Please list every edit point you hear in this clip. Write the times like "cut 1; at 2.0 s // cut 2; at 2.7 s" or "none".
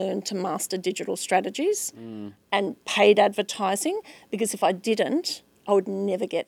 none